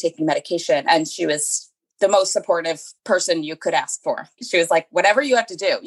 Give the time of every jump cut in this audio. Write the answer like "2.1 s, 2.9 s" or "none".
0.9 s, 2.9 s, 4.3 s